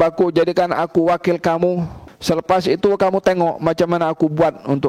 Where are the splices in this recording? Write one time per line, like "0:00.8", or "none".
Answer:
0:02.0